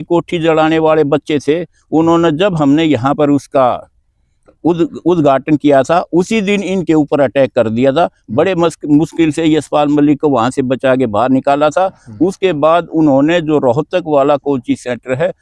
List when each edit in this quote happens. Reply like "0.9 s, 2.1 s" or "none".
none